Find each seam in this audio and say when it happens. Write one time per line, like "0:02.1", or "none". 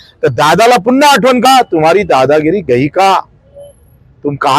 0:01.4